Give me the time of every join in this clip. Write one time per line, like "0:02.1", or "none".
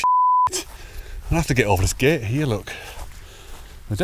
none